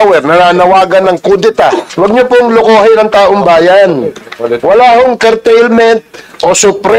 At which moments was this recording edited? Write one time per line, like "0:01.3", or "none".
0:01.9